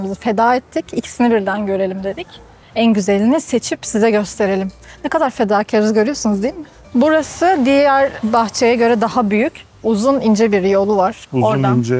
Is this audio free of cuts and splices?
yes; 0 cuts

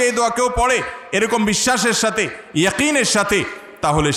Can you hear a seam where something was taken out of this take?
no; 0 cuts

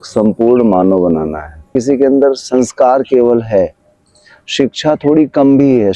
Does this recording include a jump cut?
yes; 1 cut; at 1.7 s

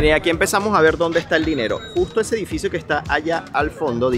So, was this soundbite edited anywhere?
no; 0 cuts

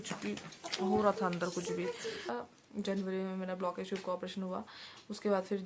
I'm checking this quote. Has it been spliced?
yes; 1 cut; at 2.3 s

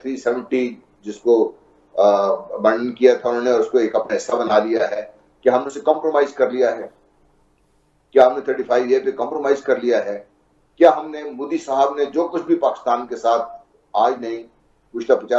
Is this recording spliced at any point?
no; 0 cuts

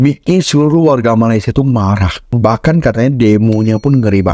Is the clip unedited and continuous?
yes; 0 cuts

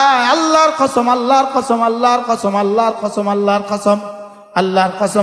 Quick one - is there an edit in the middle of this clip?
no; 0 cuts

